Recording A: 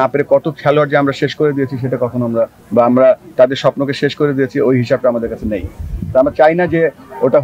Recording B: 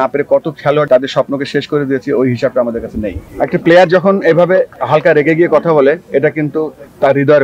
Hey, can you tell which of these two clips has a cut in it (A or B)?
B